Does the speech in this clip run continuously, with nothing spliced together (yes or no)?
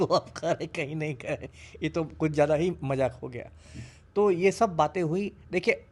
yes